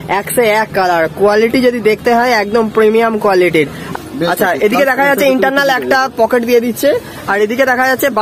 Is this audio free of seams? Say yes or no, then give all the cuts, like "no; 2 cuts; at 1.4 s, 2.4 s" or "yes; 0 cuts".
no; 1 cut; at 3.9 s